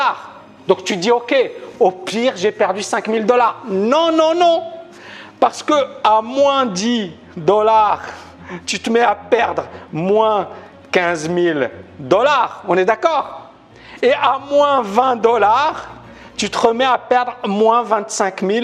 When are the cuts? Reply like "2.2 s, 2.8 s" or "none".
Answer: none